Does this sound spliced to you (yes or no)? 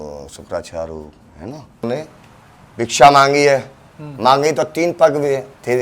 yes